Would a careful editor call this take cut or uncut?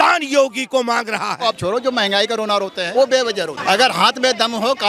cut